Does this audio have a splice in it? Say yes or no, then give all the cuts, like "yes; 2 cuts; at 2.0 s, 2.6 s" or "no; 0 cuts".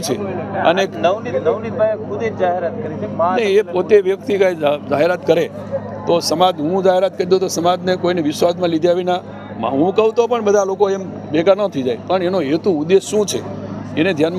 no; 0 cuts